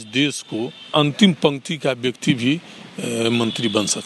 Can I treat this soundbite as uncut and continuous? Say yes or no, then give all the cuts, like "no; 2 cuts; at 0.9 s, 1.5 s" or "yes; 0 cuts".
no; 1 cut; at 0.9 s